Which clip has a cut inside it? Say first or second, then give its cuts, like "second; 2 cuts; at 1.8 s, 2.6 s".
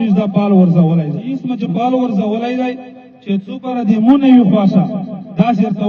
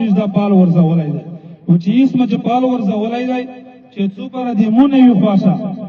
first; 1 cut; at 1.5 s